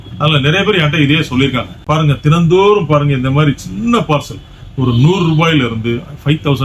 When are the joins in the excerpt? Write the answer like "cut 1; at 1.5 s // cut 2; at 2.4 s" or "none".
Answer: cut 1; at 1.7 s